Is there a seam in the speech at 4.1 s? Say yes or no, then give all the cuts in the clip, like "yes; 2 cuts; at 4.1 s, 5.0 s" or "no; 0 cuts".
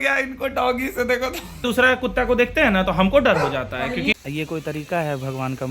yes; 2 cuts; at 1.6 s, 4.1 s